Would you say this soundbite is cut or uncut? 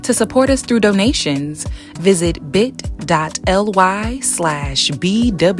uncut